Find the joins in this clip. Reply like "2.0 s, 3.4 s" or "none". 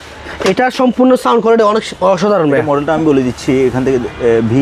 none